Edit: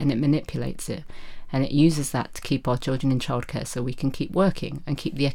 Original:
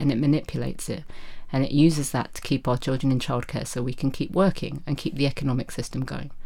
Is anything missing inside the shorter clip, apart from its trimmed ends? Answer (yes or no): no